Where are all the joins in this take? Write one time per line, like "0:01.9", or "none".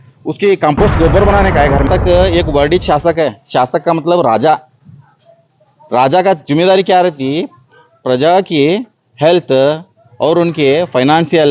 0:01.9